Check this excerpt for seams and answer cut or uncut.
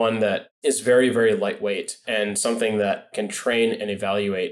cut